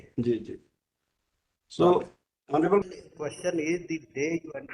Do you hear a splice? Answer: yes; 1 cut; at 2.9 s

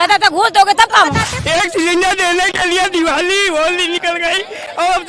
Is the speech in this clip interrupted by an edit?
yes; 1 cut; at 1.2 s

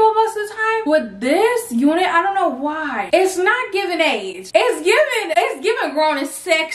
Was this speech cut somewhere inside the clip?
no; 0 cuts

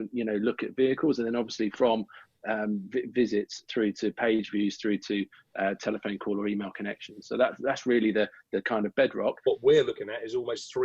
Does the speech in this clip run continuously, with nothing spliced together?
no; 1 cut; at 9.5 s

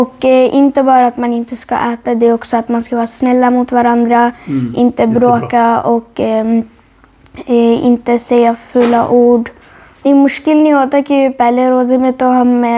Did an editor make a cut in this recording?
yes; 1 cut; at 10.1 s

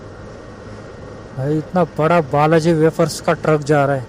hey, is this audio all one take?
no; 1 cut; at 1.0 s

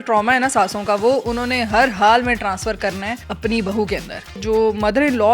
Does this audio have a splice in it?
yes; 2 cuts; at 3.2 s, 4.4 s

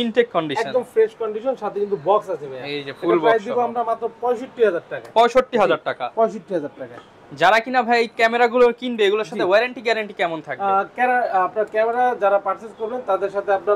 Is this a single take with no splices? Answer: yes; 0 cuts

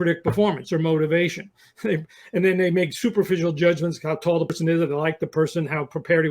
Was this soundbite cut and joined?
yes; 1 cut; at 4.5 s

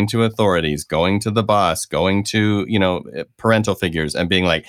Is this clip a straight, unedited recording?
yes; 0 cuts

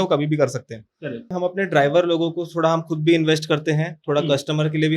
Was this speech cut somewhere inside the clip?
yes; 1 cut; at 1.3 s

